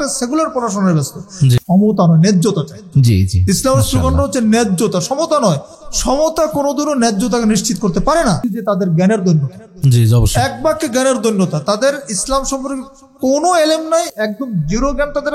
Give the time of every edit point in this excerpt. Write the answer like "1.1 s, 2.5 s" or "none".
1.6 s, 8.4 s